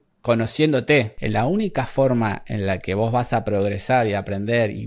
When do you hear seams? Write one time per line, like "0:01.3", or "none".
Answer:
0:01.2